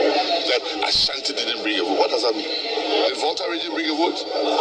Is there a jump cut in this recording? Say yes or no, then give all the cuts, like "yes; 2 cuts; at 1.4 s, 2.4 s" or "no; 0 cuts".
no; 0 cuts